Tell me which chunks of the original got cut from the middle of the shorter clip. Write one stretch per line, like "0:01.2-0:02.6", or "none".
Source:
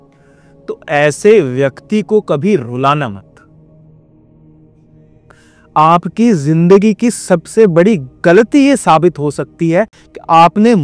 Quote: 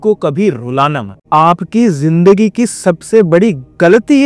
0:03.2-0:05.6